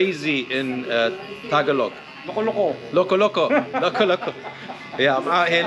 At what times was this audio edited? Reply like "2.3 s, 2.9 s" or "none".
2.2 s